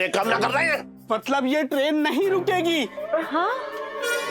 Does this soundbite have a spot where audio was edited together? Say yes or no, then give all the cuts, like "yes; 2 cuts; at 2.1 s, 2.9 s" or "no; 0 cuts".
yes; 1 cut; at 0.9 s